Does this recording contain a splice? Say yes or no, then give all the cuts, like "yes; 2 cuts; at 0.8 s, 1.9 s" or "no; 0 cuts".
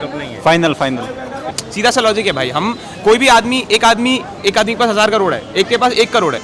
yes; 1 cut; at 1.6 s